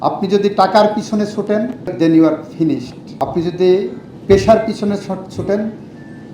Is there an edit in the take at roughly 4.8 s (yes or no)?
no